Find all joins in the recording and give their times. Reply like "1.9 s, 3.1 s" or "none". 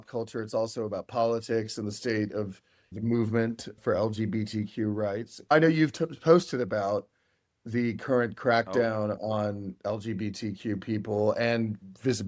2.9 s, 3.8 s, 5.5 s

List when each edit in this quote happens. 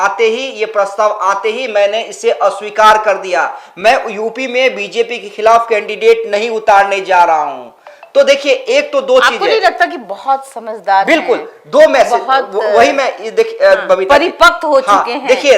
none

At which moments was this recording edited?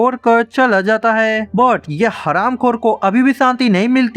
none

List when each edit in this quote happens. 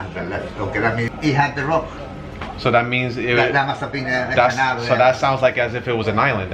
1.1 s

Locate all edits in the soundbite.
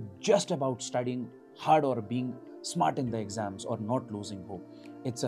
none

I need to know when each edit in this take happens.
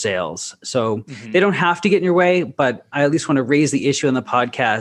none

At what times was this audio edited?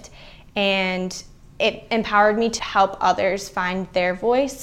2.6 s

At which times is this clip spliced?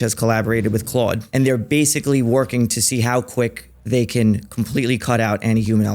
1.2 s

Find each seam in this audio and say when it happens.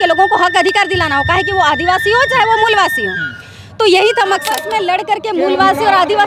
4.6 s

